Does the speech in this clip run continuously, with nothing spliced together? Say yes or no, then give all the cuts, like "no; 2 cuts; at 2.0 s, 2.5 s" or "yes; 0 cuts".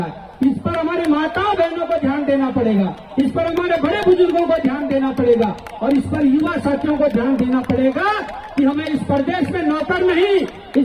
yes; 0 cuts